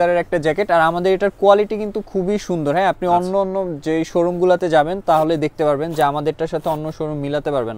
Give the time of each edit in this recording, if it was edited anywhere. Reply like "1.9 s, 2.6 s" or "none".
none